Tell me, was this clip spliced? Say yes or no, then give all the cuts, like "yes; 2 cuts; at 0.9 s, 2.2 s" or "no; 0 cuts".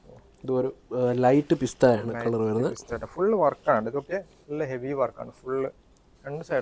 no; 0 cuts